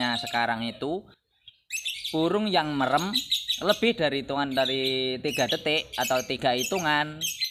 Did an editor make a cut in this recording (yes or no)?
no